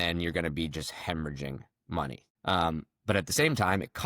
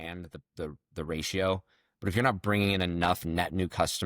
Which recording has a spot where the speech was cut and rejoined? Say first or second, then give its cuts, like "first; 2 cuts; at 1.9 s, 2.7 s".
first; 1 cut; at 2.3 s